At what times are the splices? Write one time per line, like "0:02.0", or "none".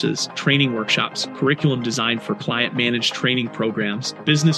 none